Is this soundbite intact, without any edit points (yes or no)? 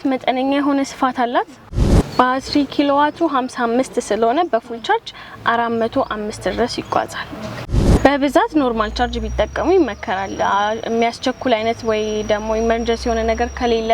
no